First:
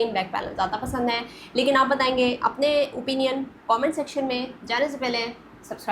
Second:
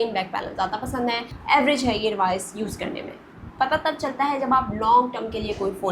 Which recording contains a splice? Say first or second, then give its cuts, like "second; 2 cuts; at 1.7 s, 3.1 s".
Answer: second; 2 cuts; at 1.3 s, 3.2 s